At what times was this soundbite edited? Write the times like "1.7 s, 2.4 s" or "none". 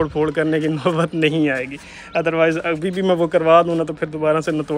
none